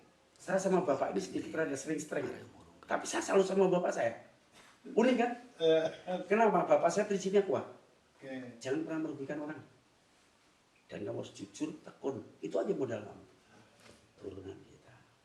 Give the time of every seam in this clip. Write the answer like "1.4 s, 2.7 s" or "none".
14.2 s